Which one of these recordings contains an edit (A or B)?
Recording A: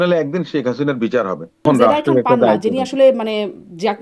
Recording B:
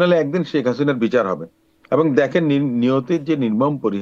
A